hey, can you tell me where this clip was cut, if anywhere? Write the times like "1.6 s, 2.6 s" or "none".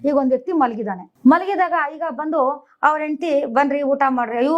1.0 s

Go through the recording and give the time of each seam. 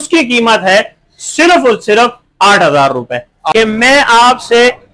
3.3 s

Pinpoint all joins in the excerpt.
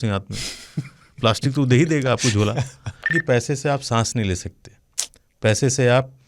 3.1 s

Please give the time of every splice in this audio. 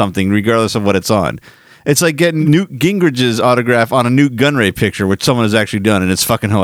2.4 s

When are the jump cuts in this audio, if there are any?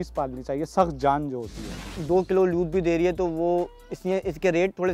1.9 s

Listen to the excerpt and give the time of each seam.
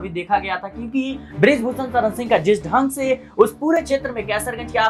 none

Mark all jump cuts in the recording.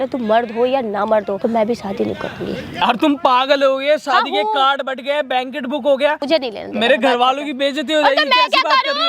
1.4 s, 2.8 s, 6.2 s

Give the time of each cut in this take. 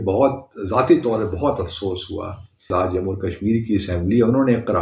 2.7 s

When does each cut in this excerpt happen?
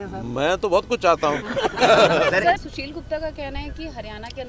2.6 s

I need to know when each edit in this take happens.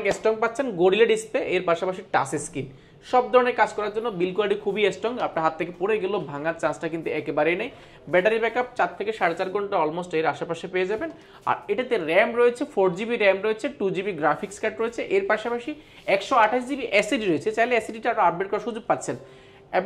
none

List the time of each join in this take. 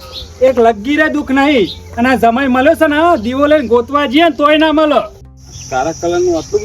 5.2 s

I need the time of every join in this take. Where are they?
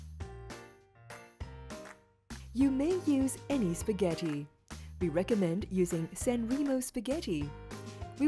1.7 s, 2.4 s

